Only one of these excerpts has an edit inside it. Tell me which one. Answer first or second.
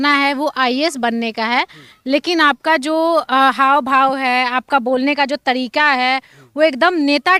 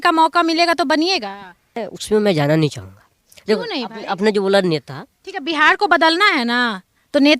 second